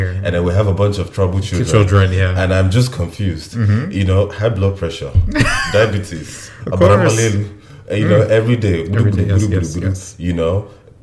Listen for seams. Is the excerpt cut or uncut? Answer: uncut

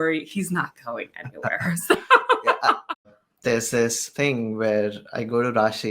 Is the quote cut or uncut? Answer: cut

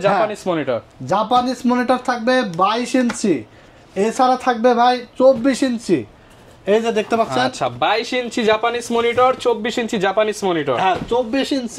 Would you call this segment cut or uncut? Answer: uncut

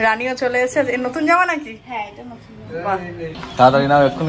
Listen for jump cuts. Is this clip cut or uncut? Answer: cut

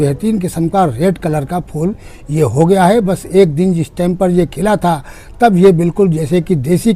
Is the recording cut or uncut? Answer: uncut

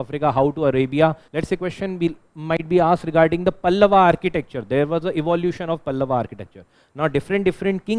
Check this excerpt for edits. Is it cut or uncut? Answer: cut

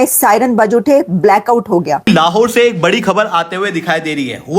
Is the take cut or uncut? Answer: cut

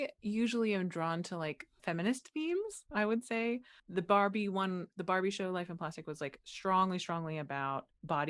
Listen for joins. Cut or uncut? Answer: cut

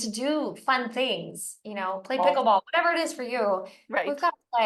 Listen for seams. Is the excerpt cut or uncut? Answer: uncut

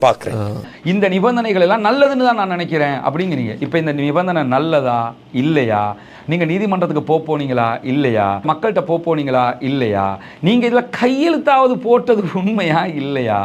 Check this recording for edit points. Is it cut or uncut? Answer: cut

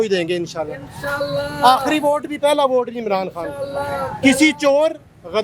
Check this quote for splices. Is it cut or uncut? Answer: uncut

